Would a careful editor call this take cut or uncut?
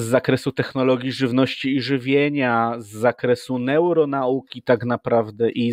uncut